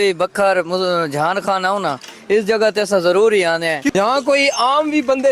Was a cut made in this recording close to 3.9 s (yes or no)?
yes